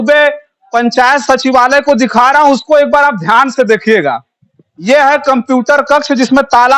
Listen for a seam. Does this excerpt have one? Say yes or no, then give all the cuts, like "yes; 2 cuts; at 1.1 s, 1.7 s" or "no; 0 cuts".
no; 0 cuts